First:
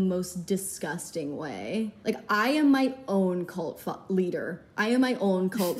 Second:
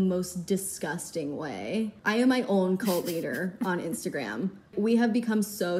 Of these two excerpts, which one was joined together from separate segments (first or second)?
second